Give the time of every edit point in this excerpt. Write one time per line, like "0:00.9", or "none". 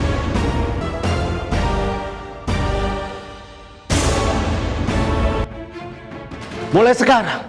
0:00.8
0:05.5